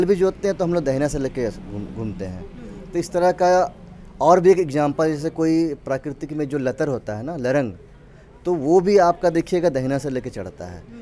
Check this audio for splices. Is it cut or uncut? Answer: uncut